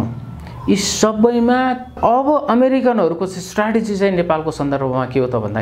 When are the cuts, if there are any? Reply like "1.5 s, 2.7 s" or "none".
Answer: 1.9 s